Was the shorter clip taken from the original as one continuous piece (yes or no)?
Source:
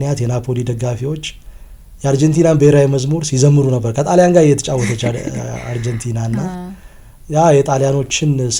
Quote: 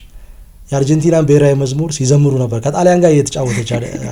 yes